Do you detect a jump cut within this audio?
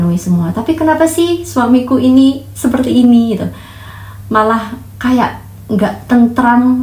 no; 0 cuts

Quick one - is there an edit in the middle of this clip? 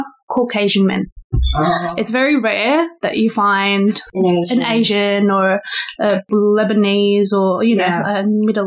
yes; 2 cuts; at 4.1 s, 6.3 s

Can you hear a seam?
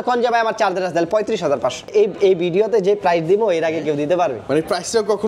yes; 1 cut; at 1.9 s

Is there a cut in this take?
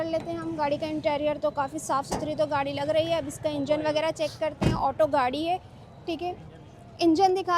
no; 0 cuts

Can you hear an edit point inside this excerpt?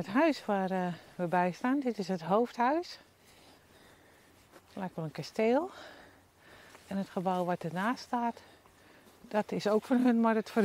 no; 0 cuts

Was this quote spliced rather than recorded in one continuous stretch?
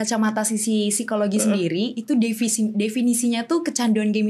no; 0 cuts

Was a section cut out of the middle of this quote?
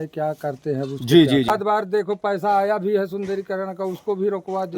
yes; 1 cut; at 1.9 s

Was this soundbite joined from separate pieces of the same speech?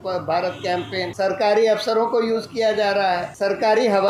yes; 2 cuts; at 1.1 s, 3.3 s

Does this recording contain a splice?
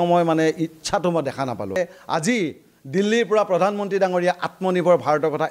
yes; 1 cut; at 1.8 s

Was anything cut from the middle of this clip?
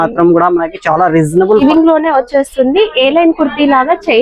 yes; 1 cut; at 1.6 s

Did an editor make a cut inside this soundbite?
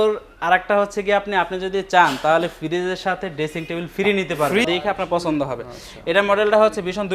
yes; 1 cut; at 4.6 s

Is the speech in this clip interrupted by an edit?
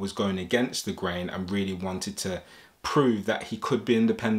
no; 0 cuts

